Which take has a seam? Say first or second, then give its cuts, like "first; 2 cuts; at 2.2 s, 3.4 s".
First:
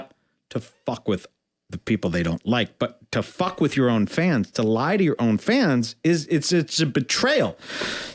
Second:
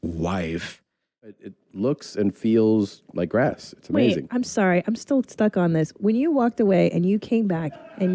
second; 1 cut; at 1.5 s